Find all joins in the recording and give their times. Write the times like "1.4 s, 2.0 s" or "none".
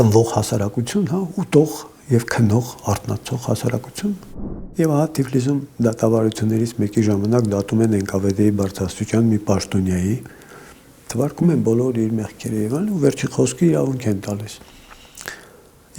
4.3 s